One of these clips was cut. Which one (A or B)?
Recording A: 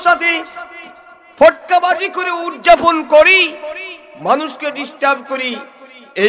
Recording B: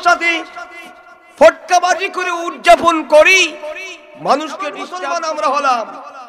B